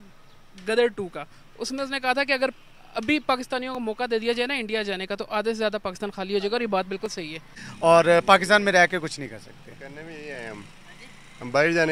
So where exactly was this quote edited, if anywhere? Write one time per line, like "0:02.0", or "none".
0:07.6